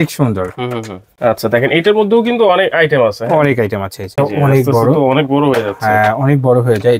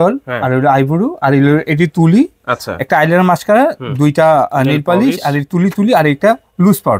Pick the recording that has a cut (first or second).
first